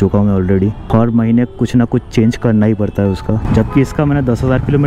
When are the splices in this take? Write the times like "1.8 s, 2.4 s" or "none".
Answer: none